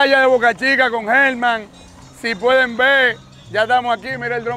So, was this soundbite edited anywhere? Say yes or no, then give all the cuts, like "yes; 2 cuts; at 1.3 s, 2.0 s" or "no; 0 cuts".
no; 0 cuts